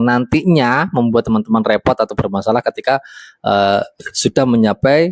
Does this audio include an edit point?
no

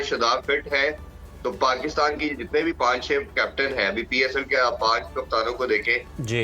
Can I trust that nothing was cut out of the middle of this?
yes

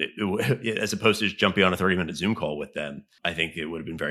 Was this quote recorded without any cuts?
no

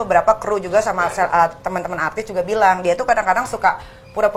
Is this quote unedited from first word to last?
yes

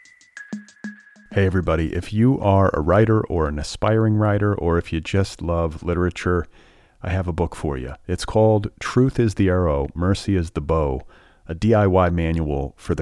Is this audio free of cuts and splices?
no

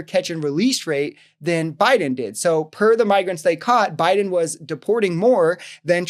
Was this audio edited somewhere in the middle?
no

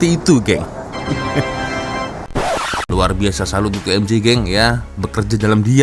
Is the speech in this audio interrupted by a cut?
yes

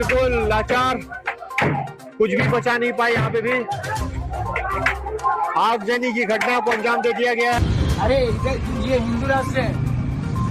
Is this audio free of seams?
no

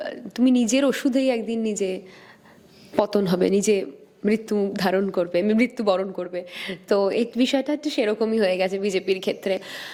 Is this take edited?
no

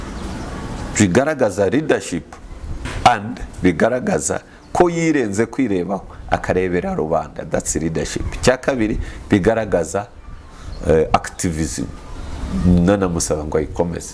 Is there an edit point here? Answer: no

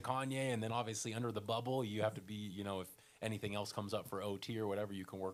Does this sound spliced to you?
no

